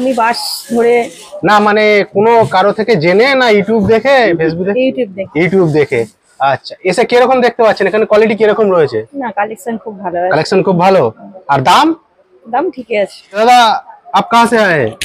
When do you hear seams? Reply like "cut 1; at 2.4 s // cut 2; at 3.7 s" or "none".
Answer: cut 1; at 13.4 s